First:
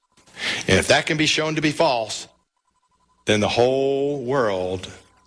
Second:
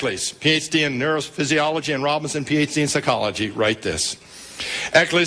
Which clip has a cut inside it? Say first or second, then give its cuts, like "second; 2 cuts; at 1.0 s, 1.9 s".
first; 1 cut; at 4.3 s